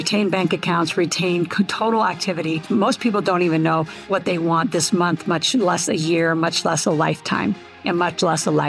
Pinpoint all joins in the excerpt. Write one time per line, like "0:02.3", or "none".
0:02.6
0:04.0